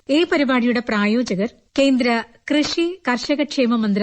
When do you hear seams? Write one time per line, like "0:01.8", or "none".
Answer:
0:01.6